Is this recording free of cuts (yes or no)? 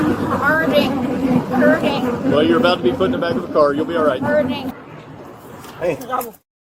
no